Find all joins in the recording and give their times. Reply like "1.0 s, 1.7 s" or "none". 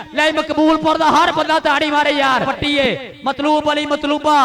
2.5 s